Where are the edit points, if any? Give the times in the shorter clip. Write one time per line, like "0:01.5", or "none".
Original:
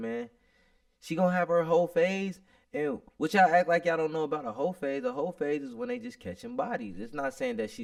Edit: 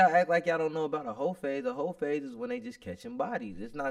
none